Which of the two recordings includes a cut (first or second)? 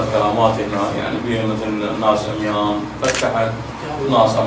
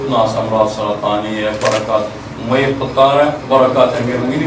second